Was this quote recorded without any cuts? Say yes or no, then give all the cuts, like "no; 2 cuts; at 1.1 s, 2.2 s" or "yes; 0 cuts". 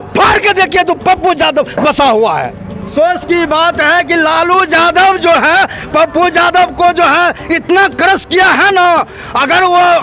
no; 1 cut; at 2.9 s